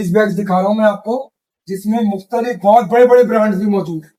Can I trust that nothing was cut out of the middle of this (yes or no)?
yes